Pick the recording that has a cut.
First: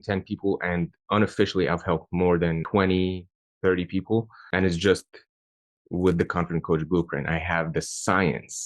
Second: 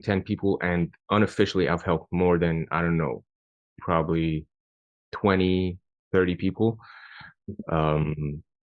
first; 2 cuts; at 2.6 s, 4.4 s

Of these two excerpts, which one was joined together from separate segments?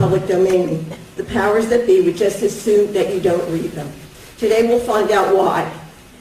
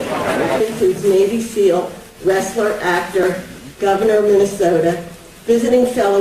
second; 1 cut; at 2.7 s

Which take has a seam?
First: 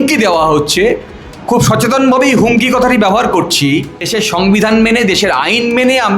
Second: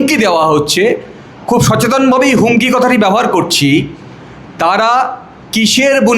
first; 1 cut; at 4.1 s

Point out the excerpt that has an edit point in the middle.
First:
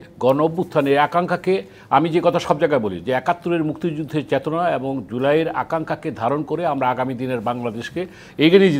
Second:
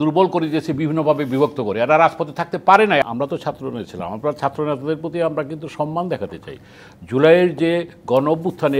second; 2 cuts; at 3.0 s, 6.8 s

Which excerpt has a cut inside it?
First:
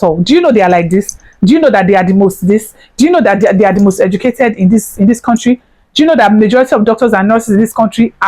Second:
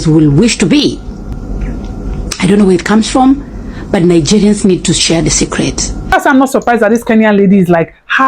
second; 2 cuts; at 1.3 s, 6.1 s

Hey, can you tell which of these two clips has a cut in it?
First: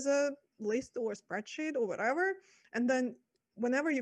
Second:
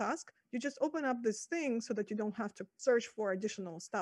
second; 1 cut; at 2.7 s

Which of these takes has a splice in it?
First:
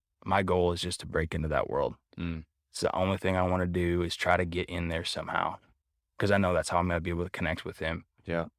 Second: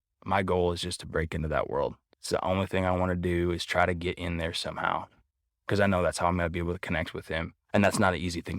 second; 2 cuts; at 2.1 s, 7.5 s

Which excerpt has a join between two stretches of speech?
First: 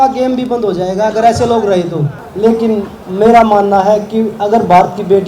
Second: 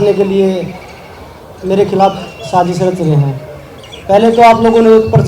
first; 1 cut; at 2.2 s

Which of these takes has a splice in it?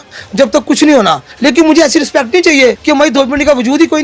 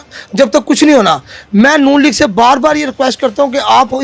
first; 2 cuts; at 1.3 s, 2.8 s

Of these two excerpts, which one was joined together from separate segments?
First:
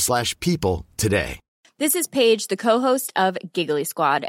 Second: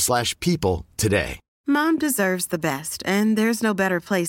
second; 1 cut; at 1.4 s

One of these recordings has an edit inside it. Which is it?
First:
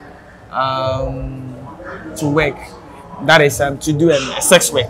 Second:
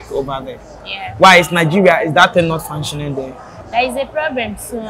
second; 1 cut; at 3.4 s

